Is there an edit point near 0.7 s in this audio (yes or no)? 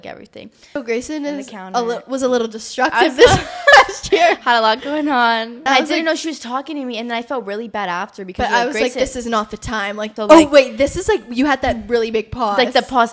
yes